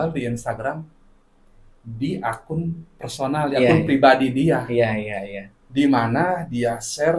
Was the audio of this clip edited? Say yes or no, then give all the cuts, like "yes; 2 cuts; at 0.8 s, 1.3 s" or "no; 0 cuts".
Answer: no; 0 cuts